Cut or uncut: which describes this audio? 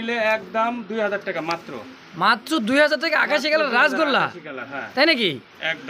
uncut